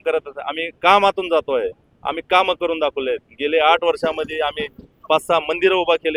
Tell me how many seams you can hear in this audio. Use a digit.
0